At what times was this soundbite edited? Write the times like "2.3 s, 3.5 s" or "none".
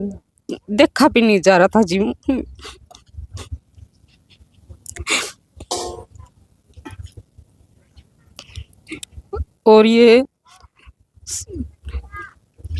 none